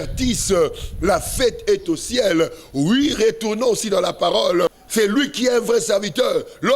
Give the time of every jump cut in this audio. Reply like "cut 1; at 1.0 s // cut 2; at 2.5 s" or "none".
cut 1; at 4.8 s

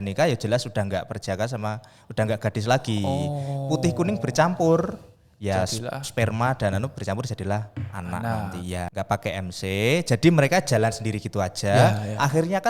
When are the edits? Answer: cut 1; at 8.9 s

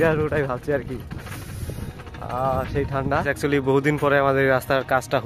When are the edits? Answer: cut 1; at 3.2 s

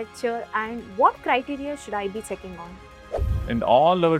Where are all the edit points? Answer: cut 1; at 3.0 s

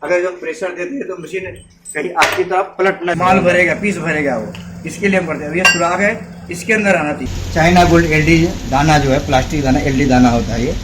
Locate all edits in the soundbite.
cut 1; at 3.2 s // cut 2; at 7.3 s

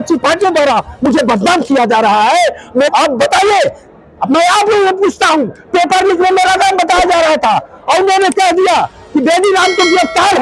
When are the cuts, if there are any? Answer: cut 1; at 2.9 s

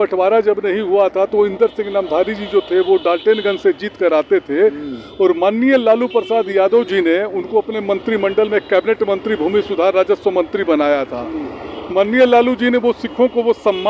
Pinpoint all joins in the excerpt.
none

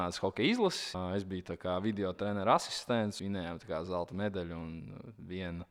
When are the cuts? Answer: cut 1; at 0.9 s // cut 2; at 3.2 s

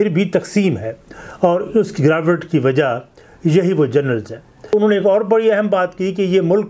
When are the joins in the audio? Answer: cut 1; at 4.7 s

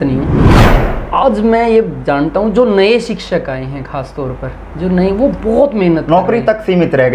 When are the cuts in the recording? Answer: none

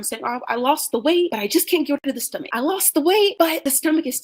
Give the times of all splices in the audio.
none

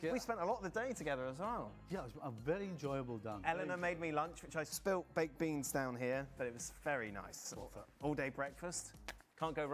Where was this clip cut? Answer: cut 1; at 1.1 s

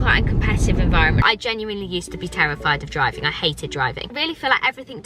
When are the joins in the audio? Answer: cut 1; at 1.2 s // cut 2; at 4.2 s

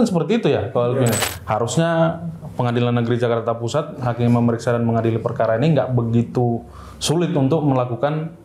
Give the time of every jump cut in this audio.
cut 1; at 1.3 s

